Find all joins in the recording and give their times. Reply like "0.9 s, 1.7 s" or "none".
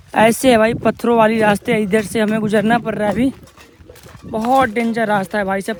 none